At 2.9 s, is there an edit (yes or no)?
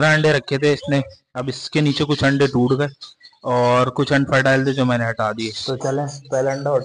no